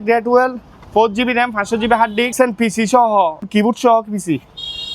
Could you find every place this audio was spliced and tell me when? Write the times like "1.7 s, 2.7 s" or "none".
2.3 s, 3.4 s